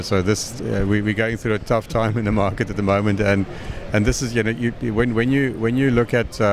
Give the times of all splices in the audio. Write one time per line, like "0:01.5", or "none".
none